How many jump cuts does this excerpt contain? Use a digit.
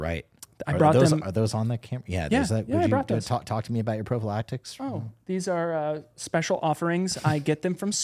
0